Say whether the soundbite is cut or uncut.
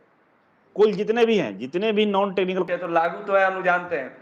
cut